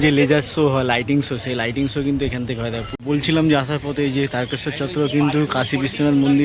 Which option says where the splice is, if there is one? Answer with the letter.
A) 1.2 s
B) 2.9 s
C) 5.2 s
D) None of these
B